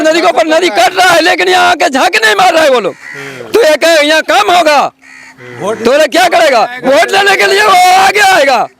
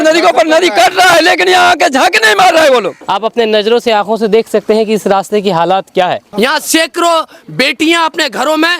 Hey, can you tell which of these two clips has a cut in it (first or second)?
second